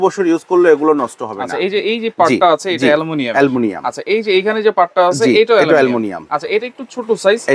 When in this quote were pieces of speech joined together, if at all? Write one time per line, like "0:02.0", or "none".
none